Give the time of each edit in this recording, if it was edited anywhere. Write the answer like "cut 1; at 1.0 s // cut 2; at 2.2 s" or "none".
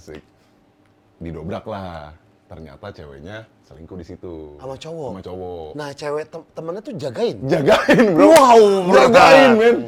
none